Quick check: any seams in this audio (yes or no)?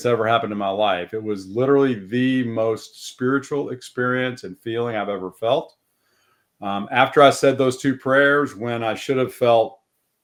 no